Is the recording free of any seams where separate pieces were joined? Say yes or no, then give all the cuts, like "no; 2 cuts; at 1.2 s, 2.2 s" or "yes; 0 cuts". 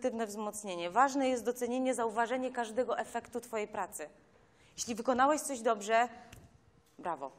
yes; 0 cuts